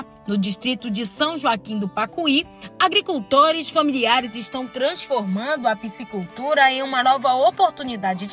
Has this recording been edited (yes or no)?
no